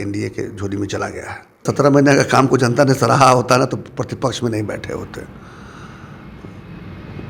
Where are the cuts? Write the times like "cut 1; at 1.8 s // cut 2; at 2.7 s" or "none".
cut 1; at 1.6 s